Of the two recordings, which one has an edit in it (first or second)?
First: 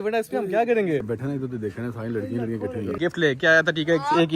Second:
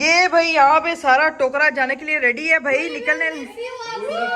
first